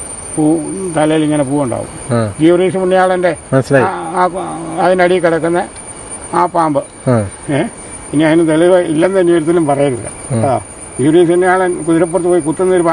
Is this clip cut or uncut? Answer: uncut